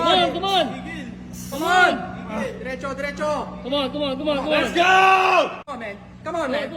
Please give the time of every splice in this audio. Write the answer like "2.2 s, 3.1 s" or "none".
5.6 s